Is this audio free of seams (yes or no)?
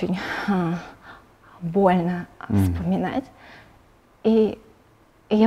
yes